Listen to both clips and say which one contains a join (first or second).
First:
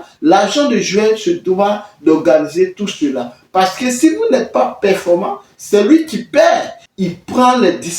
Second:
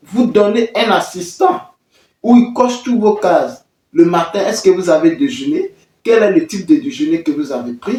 first